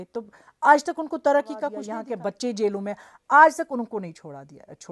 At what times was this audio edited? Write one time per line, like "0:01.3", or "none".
0:01.8